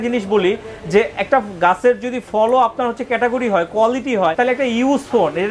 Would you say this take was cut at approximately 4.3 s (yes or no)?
yes